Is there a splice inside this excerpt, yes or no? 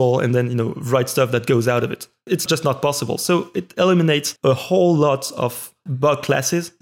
yes